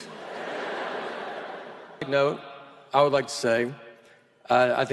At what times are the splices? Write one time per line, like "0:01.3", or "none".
0:02.1